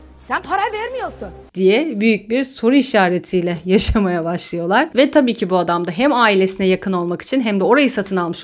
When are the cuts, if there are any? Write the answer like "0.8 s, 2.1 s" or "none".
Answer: none